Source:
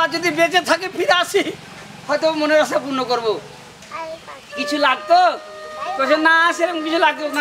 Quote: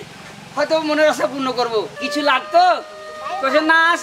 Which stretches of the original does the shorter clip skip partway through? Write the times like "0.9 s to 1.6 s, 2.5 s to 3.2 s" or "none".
3.5 s to 4.5 s